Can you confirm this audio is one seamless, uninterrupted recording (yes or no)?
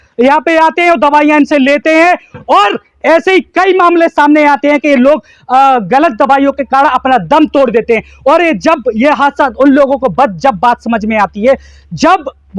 yes